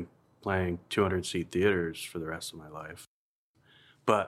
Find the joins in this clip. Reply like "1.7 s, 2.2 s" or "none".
3.3 s